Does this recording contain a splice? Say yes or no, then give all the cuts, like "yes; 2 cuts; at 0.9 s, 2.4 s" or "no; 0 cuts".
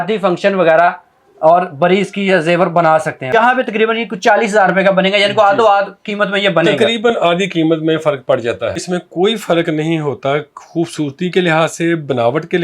yes; 2 cuts; at 3.3 s, 8.8 s